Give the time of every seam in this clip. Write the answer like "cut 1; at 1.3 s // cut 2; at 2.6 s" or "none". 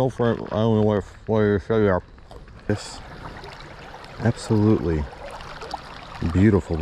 cut 1; at 2.7 s

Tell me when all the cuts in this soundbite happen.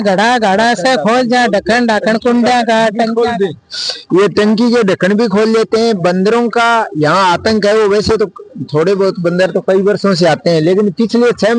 none

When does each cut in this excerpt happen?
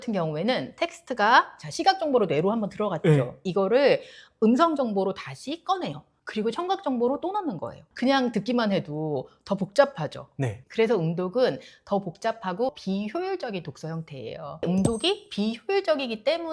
none

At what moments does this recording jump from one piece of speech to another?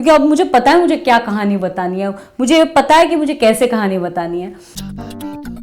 cut 1; at 4.6 s

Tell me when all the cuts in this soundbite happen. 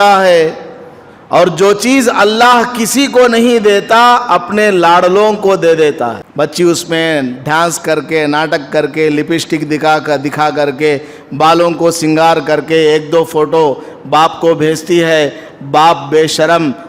cut 1; at 6.2 s

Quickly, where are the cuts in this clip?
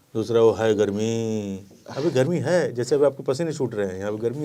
none

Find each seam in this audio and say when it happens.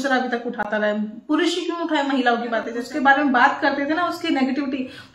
cut 1; at 2.8 s

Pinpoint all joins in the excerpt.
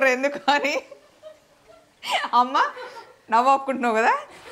none

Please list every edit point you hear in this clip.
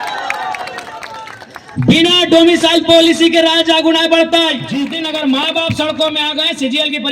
cut 1; at 4.7 s

